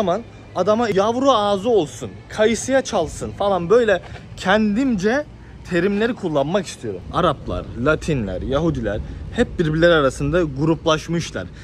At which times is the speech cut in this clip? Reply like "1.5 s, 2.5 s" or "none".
0.9 s, 7.1 s